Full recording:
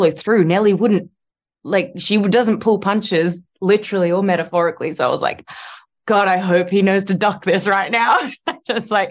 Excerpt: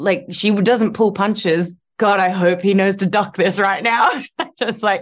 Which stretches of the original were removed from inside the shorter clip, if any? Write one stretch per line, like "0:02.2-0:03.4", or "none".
0:03.5-0:05.9